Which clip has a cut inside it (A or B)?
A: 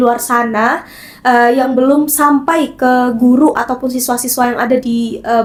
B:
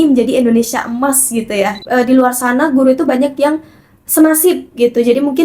B